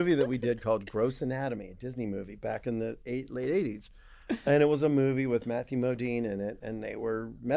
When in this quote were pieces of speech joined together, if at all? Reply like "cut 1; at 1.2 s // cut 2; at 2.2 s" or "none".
cut 1; at 4.1 s